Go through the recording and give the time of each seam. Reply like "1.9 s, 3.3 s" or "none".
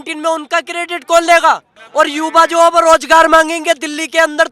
1.7 s